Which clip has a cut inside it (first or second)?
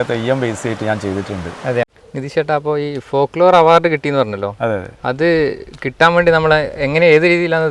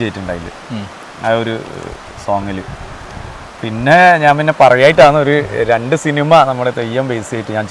first